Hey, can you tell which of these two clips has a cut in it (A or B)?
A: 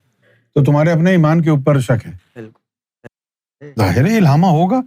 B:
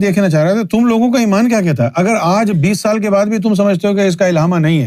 A